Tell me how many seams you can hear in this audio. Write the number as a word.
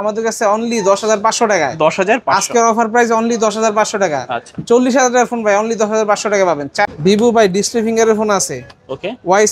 one